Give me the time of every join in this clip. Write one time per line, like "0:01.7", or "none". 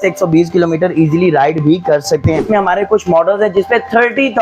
0:02.4